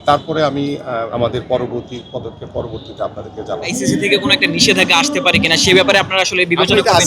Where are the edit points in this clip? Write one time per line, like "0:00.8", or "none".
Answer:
0:01.1
0:03.7